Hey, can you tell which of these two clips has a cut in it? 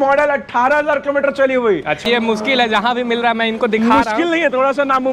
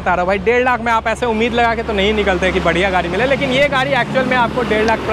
first; 1 cut; at 2.0 s

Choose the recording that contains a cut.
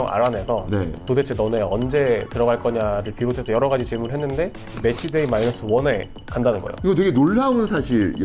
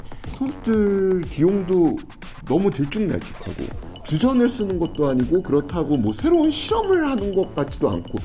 first; 2 cuts; at 1.0 s, 4.7 s

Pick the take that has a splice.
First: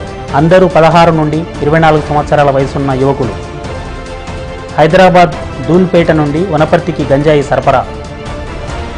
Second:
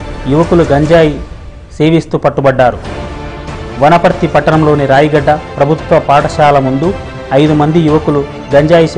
first; 1 cut; at 7.9 s

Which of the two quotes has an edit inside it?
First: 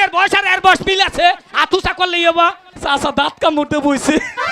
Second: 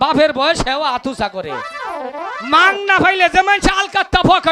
first; 1 cut; at 2.7 s

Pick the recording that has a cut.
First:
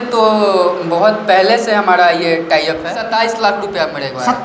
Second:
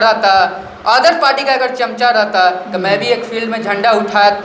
first; 1 cut; at 3.0 s

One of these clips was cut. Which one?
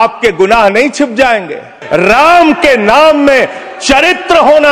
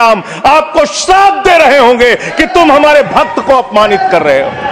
first; 1 cut; at 1.8 s

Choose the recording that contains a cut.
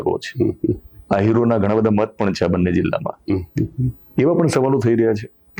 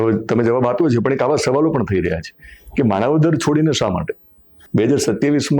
second; 1 cut; at 4.5 s

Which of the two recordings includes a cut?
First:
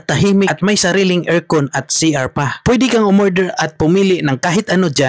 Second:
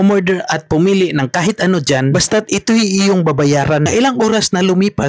second; 1 cut; at 3.9 s

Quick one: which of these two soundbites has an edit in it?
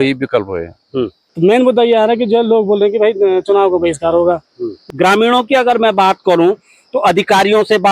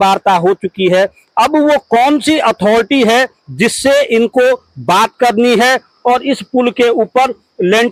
first; 2 cuts; at 1.2 s, 4.8 s

